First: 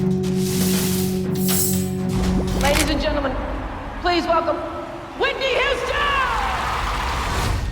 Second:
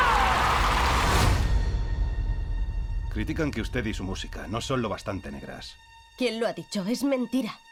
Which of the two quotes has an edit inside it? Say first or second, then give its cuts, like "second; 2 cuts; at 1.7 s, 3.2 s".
first; 1 cut; at 2.6 s